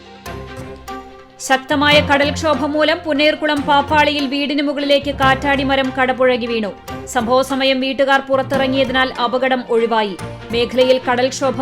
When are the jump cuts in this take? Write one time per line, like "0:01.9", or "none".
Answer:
0:01.0